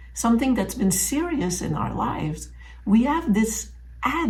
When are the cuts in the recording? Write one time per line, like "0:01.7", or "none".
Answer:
none